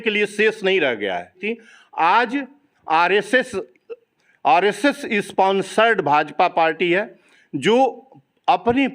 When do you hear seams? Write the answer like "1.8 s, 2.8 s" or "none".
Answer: 1.5 s